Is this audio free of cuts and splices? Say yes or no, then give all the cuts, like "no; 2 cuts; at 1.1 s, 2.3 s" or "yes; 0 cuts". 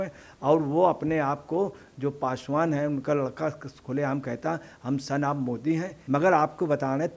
no; 1 cut; at 6.0 s